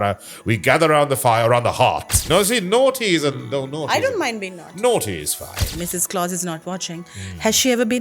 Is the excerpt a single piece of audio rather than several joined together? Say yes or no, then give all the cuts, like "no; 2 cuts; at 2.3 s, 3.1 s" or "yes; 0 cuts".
no; 2 cuts; at 2.1 s, 5.7 s